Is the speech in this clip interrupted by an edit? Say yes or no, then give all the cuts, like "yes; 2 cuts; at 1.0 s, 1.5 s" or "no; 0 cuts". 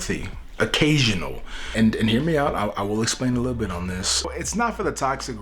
no; 0 cuts